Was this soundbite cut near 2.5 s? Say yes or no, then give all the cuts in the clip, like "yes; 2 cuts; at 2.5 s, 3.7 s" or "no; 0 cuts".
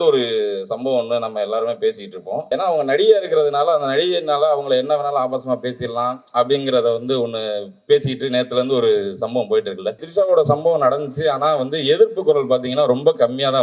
yes; 2 cuts; at 2.5 s, 10.0 s